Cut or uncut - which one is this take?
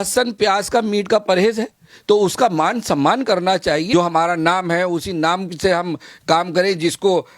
cut